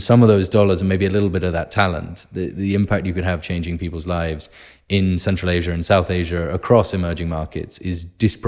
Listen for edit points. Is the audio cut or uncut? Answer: uncut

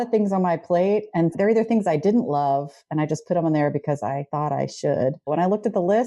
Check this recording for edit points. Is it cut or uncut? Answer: cut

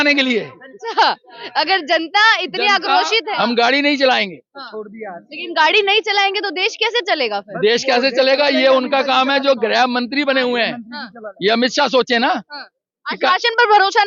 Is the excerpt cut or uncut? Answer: cut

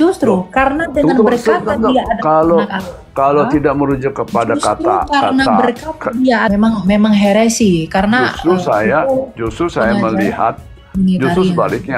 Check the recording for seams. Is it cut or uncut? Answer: cut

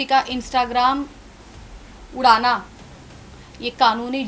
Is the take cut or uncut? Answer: uncut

